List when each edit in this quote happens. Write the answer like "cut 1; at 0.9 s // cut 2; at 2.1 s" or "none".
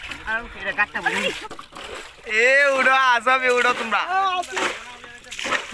cut 1; at 1.4 s